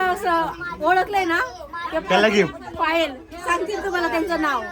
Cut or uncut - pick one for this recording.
uncut